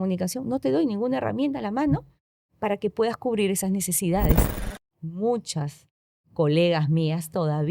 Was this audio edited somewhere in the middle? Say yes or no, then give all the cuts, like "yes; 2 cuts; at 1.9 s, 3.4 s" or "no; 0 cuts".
yes; 1 cut; at 4.6 s